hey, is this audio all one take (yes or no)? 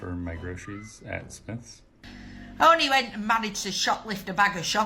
no